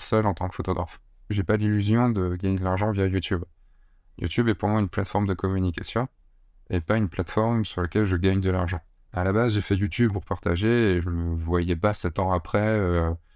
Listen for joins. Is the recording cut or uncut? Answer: cut